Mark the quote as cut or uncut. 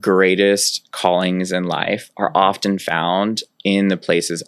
uncut